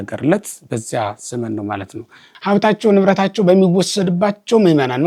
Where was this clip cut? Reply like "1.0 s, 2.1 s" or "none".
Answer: 2.3 s